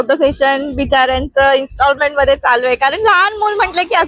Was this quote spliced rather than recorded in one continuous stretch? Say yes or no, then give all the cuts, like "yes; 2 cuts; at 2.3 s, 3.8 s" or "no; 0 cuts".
no; 0 cuts